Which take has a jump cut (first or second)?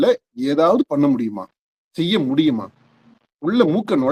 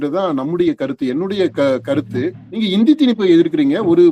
second